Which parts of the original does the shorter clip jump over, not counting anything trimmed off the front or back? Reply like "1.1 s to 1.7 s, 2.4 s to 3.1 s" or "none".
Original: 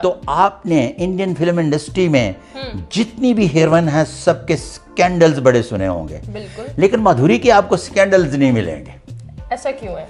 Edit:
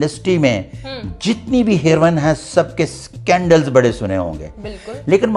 none